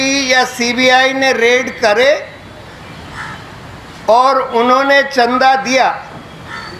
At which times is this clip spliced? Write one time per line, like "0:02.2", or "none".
none